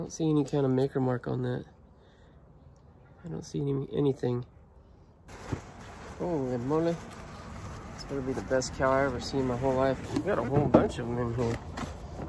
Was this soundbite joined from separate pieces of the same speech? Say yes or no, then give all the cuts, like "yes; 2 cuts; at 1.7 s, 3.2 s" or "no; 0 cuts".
yes; 2 cuts; at 5.3 s, 10.0 s